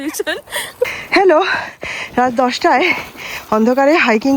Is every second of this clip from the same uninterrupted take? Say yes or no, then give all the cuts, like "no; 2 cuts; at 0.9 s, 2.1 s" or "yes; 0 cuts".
no; 1 cut; at 0.9 s